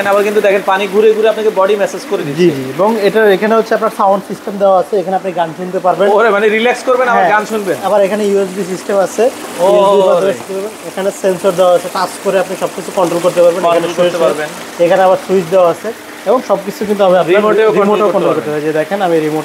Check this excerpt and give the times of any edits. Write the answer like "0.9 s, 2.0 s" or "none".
none